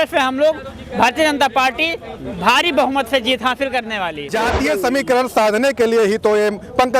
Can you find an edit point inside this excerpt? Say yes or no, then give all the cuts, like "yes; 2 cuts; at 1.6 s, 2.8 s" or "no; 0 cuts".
yes; 1 cut; at 4.3 s